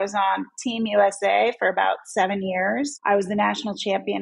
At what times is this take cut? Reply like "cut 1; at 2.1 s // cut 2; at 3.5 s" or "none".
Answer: cut 1; at 3.0 s